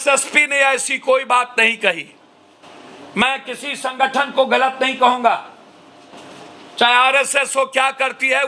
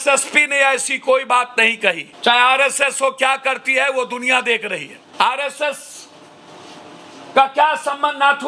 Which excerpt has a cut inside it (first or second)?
second